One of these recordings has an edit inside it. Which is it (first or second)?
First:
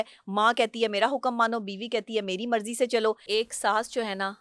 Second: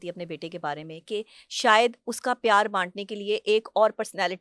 first